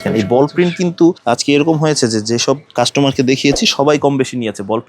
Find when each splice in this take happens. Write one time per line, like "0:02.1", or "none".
0:01.2
0:02.7